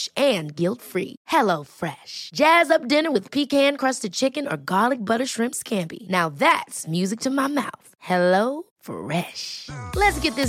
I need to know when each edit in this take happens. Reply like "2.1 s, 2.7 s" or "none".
none